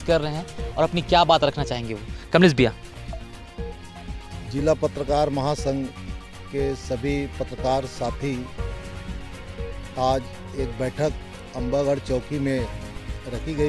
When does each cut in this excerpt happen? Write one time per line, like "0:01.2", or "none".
none